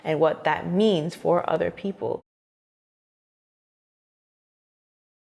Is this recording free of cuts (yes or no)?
yes